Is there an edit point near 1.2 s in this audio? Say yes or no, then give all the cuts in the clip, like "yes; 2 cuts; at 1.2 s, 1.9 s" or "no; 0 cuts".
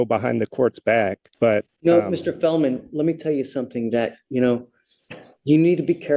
yes; 1 cut; at 1.2 s